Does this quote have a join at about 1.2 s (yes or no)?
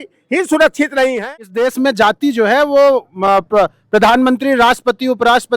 yes